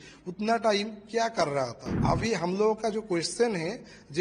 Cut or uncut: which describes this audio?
cut